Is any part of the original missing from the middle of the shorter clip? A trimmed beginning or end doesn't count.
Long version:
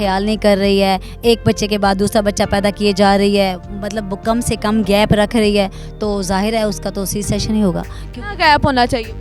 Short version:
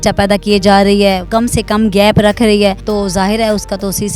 yes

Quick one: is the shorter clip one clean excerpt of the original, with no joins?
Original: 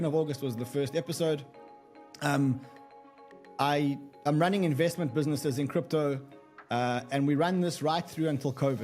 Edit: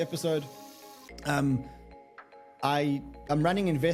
yes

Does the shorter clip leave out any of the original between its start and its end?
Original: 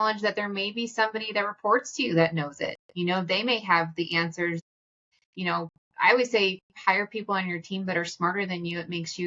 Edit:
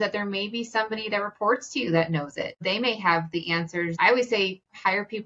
yes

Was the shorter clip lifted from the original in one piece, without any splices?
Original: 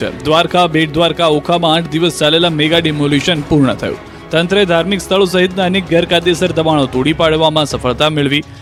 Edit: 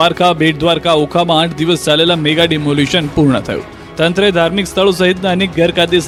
yes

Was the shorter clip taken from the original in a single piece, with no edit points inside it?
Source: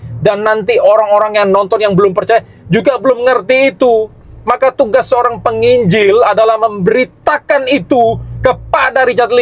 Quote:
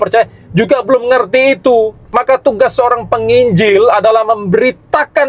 no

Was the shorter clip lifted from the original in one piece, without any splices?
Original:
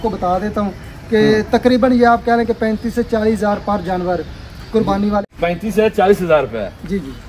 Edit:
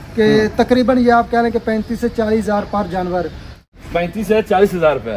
no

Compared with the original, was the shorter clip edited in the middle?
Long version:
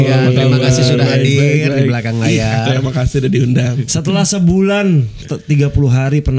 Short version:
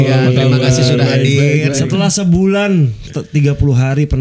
yes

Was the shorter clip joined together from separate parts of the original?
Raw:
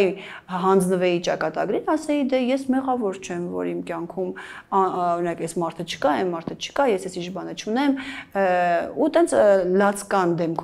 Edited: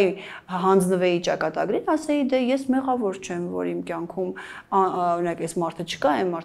no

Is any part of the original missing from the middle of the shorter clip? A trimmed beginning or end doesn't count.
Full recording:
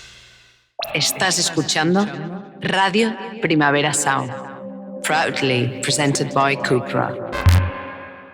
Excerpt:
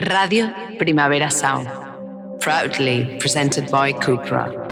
no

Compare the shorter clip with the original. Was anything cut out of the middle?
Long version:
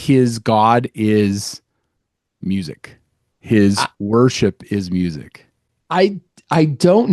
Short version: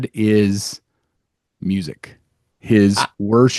no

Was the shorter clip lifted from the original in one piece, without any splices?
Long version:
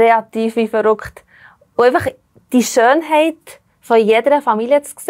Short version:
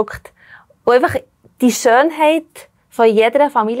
yes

